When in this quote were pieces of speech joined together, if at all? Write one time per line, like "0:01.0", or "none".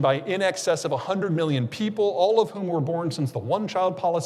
none